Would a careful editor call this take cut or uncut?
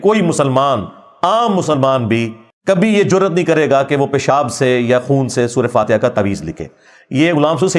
uncut